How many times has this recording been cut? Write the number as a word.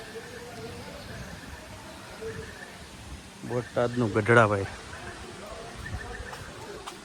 zero